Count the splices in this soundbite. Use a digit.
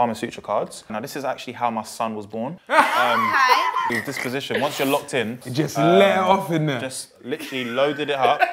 2